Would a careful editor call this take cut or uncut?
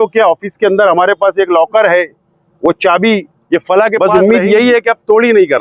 cut